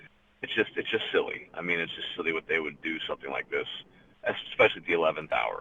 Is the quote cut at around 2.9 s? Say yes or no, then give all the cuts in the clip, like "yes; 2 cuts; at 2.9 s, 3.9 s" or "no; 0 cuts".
no; 0 cuts